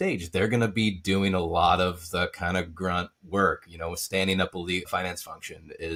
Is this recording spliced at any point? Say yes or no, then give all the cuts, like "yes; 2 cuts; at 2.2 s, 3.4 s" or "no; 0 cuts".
no; 0 cuts